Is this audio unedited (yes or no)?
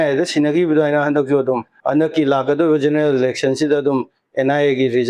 no